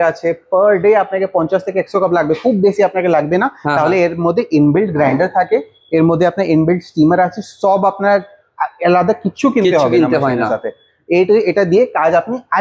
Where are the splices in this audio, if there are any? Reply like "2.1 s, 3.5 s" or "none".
none